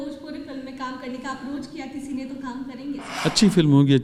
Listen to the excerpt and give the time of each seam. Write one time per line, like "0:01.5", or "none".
none